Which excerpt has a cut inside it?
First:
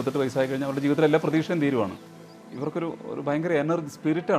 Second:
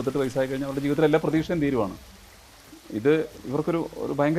first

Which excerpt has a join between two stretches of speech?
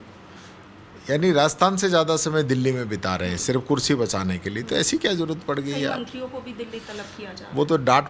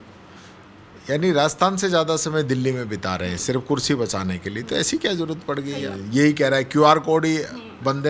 second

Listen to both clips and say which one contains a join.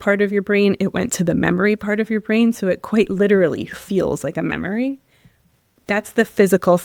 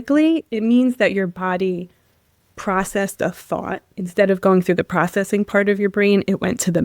second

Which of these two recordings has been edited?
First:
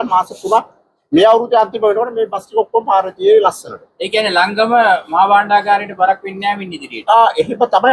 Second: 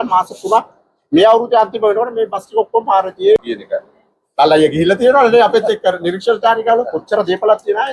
second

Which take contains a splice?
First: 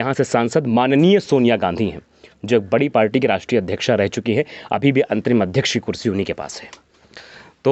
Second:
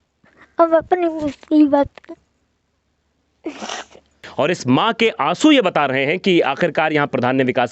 second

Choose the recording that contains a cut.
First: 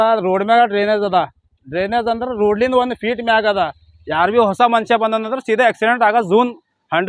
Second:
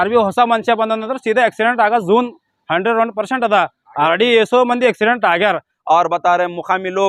second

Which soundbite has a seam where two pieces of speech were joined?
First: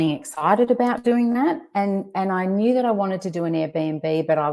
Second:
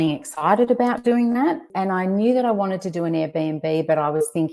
second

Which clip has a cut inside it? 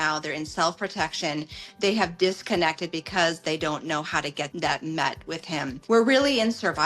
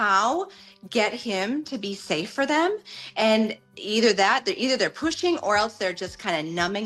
first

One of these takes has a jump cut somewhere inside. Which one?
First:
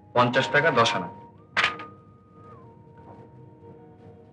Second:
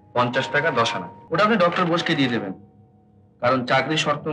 second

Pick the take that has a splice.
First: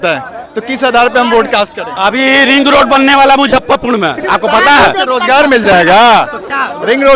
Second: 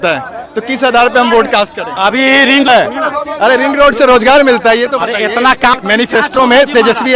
second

